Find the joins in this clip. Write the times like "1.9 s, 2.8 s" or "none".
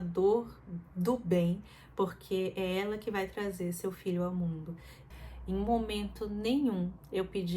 5.0 s